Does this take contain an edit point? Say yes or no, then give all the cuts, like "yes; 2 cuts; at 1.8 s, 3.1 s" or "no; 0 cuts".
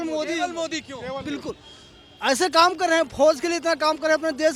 no; 0 cuts